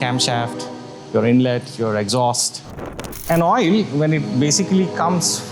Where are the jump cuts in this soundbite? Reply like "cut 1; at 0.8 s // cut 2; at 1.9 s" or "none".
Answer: cut 1; at 3.0 s